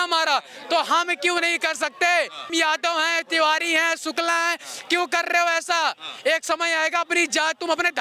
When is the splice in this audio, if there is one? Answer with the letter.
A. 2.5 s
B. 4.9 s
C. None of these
A